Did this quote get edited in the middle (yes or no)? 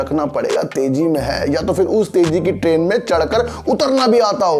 no